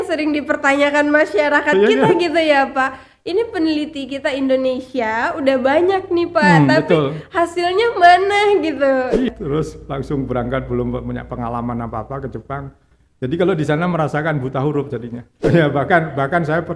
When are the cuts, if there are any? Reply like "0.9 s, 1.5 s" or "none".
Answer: 9.3 s, 15.4 s